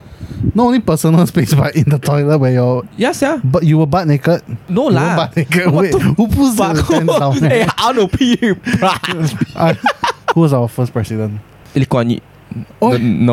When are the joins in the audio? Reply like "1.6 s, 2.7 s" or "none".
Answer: 10.3 s